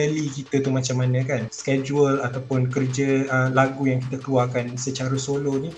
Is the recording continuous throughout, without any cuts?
no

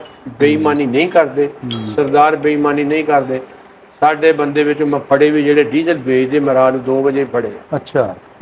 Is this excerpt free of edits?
yes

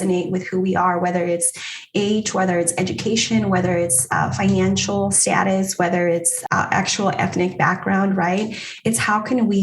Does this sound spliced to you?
yes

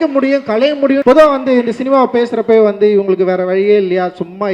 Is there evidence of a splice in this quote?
yes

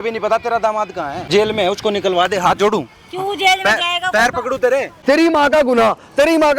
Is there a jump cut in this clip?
yes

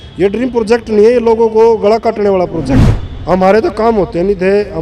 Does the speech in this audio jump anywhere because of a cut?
yes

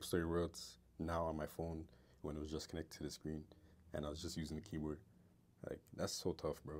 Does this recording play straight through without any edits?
yes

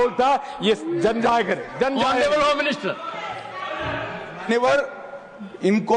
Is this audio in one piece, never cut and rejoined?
yes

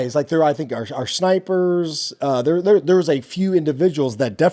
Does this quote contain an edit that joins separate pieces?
no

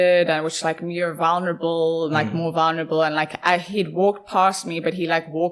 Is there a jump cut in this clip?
no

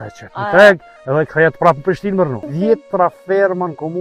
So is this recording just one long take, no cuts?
no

